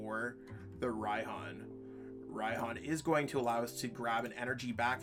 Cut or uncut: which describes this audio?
uncut